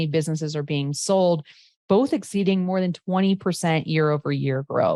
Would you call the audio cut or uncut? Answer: uncut